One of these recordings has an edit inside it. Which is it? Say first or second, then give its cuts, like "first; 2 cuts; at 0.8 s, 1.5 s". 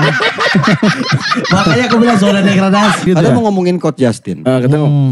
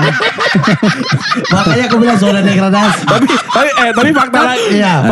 first; 1 cut; at 3.1 s